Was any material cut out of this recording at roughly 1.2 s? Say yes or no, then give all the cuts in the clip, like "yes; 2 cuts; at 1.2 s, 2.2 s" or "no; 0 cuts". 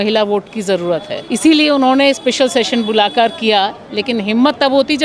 yes; 1 cut; at 1.2 s